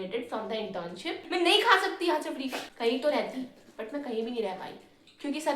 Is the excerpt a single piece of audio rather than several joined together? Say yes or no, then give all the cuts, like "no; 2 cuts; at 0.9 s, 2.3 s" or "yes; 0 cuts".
no; 2 cuts; at 1.2 s, 2.6 s